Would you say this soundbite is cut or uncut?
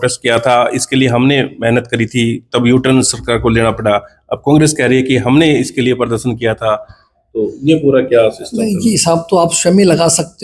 uncut